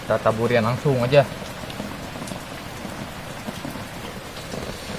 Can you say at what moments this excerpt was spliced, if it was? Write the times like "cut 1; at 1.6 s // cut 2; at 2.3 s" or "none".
cut 1; at 4.0 s

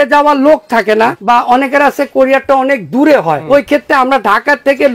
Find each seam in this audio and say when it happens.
cut 1; at 1.2 s // cut 2; at 3.4 s

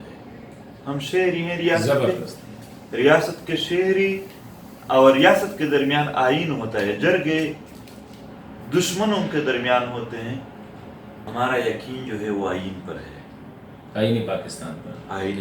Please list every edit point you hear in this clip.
cut 1; at 11.3 s

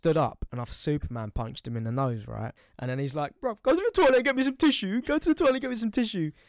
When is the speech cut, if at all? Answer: cut 1; at 2.6 s

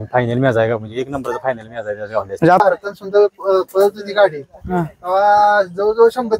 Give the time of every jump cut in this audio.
cut 1; at 2.6 s

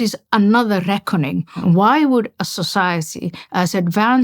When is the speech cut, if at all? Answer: cut 1; at 1.6 s

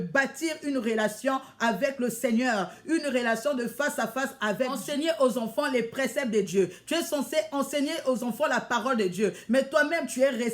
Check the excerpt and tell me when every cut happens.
cut 1; at 4.8 s

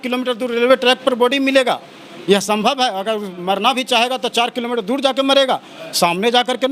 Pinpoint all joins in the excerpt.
none

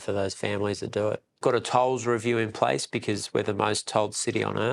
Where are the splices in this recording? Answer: cut 1; at 1.4 s

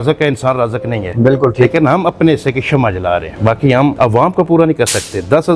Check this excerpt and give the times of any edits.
cut 1; at 3.9 s

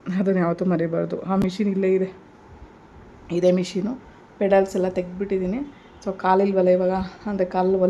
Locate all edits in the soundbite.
none

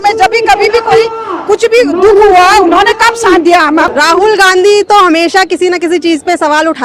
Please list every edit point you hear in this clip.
cut 1; at 3.9 s

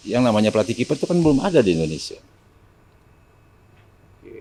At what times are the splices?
none

